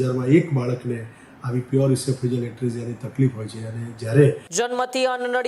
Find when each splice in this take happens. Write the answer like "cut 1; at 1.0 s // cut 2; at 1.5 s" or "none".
cut 1; at 4.4 s